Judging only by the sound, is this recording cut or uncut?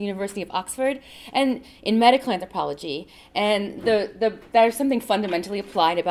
uncut